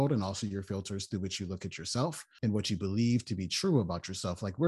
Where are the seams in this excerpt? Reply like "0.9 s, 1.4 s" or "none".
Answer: 2.3 s